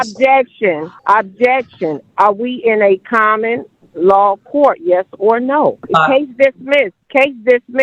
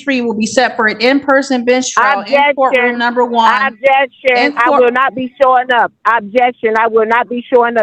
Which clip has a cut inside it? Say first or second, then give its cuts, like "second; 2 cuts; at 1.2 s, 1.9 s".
first; 3 cuts; at 0.9 s, 5.8 s, 7.0 s